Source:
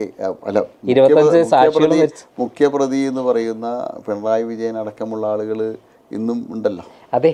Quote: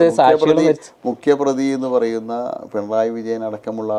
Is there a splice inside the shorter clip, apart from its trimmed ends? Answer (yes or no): no